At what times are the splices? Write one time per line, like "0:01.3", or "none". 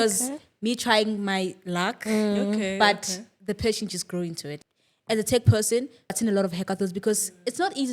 0:04.5
0:06.1